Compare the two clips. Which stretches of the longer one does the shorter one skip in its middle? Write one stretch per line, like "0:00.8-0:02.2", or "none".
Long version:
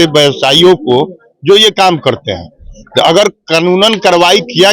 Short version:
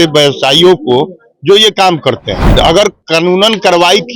0:02.4-0:02.8